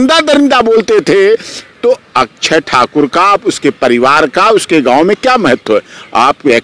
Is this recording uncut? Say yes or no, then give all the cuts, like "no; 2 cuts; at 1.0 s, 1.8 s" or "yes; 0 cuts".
yes; 0 cuts